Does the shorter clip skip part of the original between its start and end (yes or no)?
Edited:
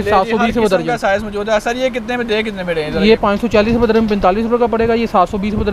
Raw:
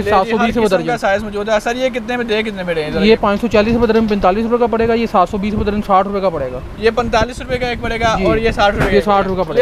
no